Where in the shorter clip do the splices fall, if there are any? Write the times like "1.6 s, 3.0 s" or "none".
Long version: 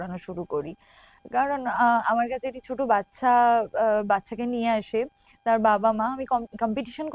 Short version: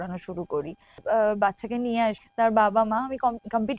1.0 s, 2.2 s